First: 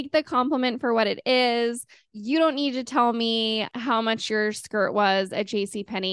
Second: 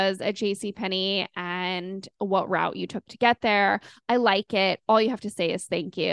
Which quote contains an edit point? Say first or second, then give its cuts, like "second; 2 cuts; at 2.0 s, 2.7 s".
first; 1 cut; at 3.7 s